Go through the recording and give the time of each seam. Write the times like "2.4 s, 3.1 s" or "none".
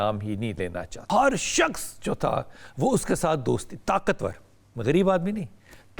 0.9 s

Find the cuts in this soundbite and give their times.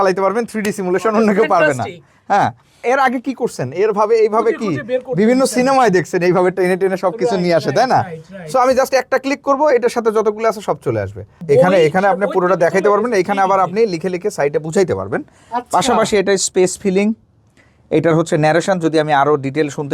2.8 s, 11.3 s

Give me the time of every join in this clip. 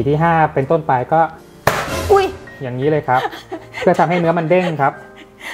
none

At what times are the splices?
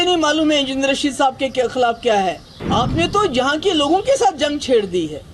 2.5 s

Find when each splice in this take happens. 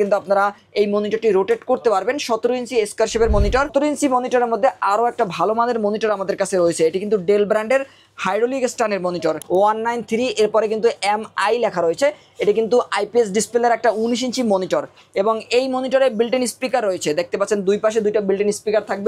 3.7 s, 9.4 s

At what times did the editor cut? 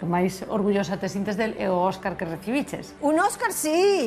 2.8 s

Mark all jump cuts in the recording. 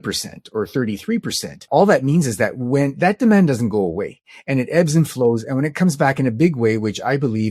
1.6 s

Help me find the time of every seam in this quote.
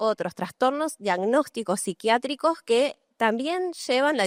none

